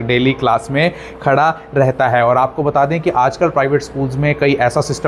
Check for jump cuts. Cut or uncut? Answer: uncut